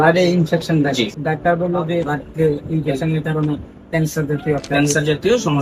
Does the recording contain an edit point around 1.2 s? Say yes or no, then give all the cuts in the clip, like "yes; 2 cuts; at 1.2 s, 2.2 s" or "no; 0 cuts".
yes; 2 cuts; at 1.2 s, 2.1 s